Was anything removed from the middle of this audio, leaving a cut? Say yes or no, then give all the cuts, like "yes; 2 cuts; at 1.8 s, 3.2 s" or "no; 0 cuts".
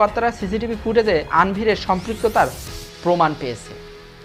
no; 0 cuts